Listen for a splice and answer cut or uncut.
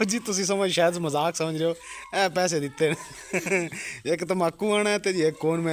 uncut